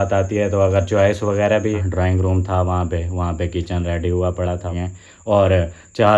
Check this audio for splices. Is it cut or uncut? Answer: cut